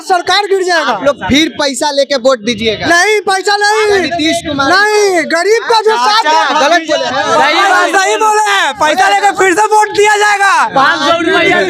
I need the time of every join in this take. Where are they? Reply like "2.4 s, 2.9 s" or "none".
none